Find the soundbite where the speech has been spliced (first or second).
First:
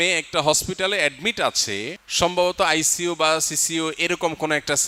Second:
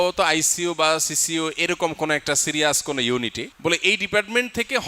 second